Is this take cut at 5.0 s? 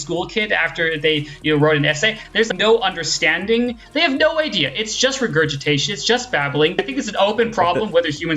no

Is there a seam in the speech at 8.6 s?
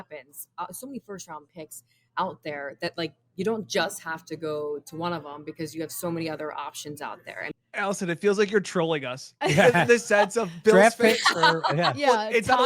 no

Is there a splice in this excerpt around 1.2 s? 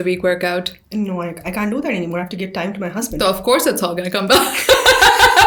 no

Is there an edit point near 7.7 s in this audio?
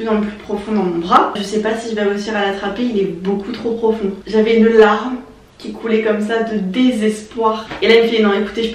yes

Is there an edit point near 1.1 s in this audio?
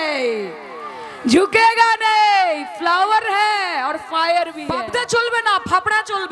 no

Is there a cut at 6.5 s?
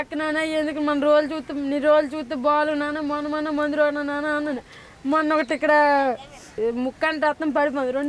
yes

